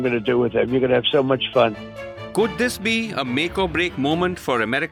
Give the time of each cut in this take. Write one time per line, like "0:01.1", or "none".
none